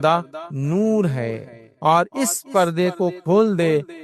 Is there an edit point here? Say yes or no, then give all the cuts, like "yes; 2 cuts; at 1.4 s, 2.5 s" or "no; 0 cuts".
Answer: yes; 2 cuts; at 1.6 s, 3.2 s